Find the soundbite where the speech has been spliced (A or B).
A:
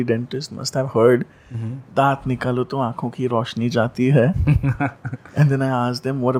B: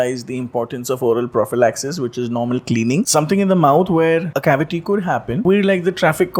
B